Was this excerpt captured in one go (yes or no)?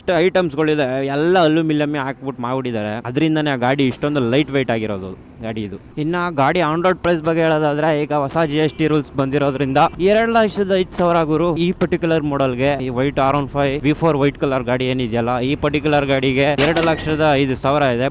yes